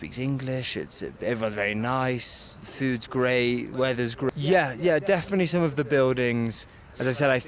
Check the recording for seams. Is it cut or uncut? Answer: cut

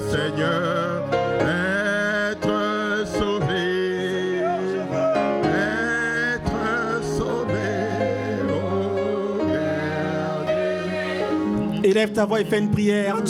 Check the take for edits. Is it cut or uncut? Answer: uncut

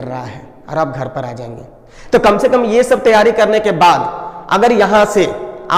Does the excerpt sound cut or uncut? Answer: uncut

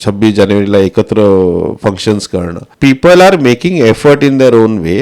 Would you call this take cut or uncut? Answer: cut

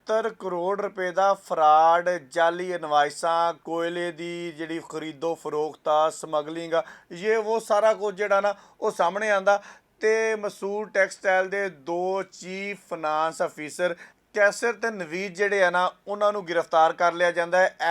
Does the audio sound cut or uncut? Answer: cut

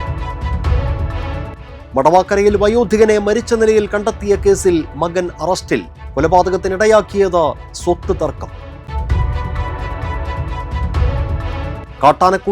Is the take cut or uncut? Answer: cut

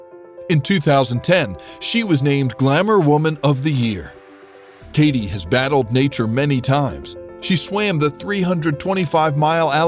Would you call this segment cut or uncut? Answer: uncut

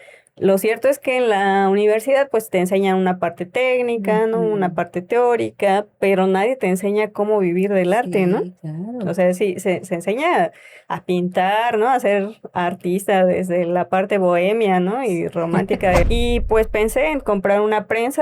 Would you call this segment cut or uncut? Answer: cut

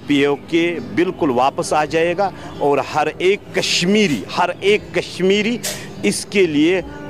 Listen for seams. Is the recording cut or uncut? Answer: uncut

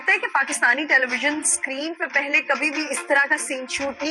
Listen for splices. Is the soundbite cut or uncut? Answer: uncut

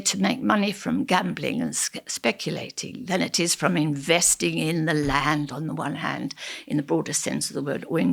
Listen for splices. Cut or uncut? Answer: uncut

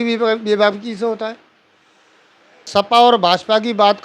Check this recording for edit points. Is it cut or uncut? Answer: cut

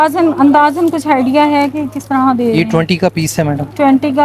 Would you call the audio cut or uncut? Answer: uncut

